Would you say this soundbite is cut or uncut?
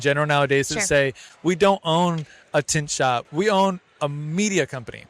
cut